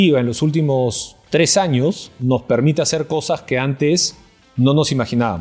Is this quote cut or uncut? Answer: uncut